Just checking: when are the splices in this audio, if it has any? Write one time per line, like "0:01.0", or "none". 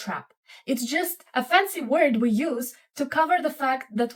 none